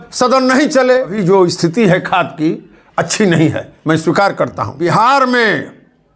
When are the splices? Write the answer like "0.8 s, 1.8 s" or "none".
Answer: 1.2 s, 4.8 s